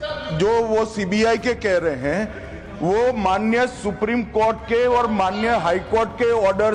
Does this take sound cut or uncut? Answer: uncut